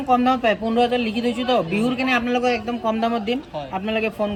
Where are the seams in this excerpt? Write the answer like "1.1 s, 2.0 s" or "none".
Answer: none